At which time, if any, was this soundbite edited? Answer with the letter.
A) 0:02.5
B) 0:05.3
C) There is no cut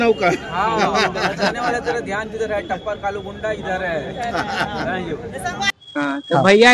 B